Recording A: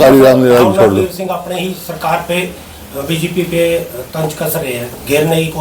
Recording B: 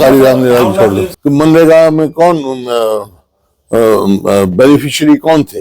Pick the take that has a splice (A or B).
B